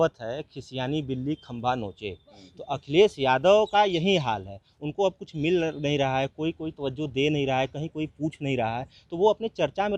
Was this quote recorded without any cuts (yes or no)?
yes